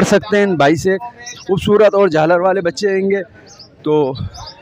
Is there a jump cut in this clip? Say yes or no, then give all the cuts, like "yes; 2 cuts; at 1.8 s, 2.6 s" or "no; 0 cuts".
no; 0 cuts